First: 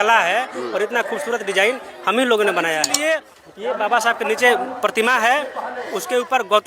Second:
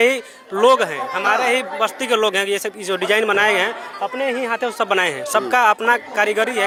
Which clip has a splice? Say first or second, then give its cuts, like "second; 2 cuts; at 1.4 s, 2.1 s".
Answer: first; 1 cut; at 2.9 s